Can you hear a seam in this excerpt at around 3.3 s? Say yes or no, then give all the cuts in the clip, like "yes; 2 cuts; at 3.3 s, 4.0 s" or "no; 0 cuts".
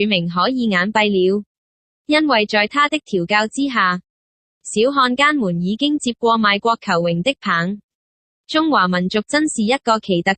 yes; 1 cut; at 3.3 s